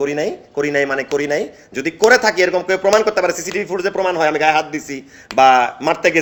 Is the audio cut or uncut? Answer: uncut